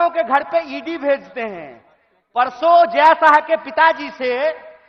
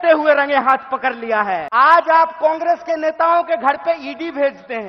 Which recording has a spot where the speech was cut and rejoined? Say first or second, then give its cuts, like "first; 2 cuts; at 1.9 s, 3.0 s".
second; 1 cut; at 1.7 s